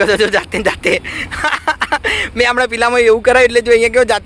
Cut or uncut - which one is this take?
uncut